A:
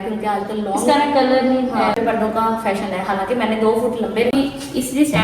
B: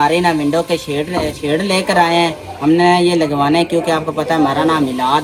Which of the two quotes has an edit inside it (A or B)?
A